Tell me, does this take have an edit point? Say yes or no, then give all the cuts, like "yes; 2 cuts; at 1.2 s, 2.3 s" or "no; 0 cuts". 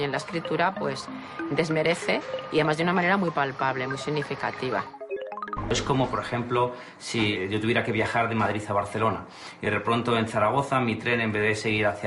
yes; 2 cuts; at 5.2 s, 7.3 s